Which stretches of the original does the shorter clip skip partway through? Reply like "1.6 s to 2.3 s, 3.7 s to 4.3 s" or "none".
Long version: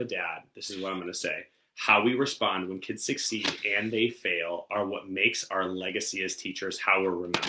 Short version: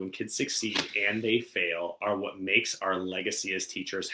none